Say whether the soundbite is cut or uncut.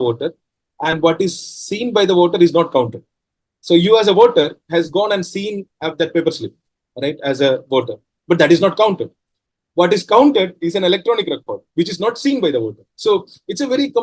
uncut